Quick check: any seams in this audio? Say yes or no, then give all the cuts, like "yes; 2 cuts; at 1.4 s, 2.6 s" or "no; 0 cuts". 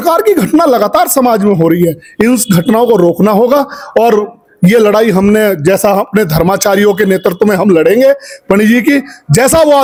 no; 0 cuts